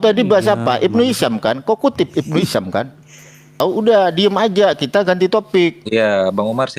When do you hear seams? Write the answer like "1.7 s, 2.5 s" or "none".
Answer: 3.5 s